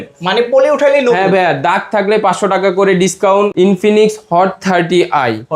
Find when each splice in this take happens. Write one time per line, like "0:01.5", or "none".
0:03.5

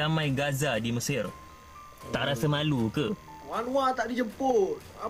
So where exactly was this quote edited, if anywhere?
0:03.4

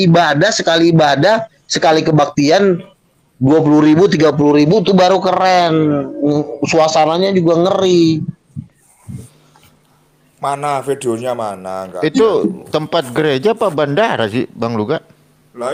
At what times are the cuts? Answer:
none

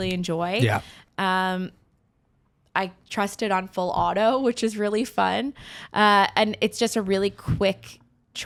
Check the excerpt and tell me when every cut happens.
none

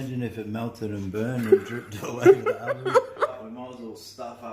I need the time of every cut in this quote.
0:03.4

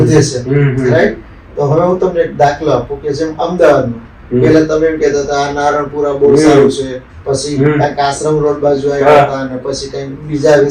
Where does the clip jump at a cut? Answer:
none

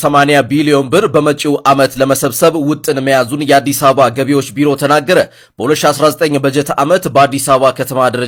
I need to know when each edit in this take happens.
none

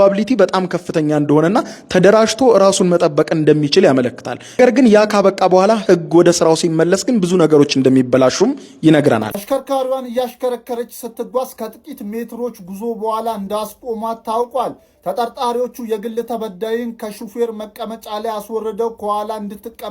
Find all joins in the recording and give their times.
0:09.4

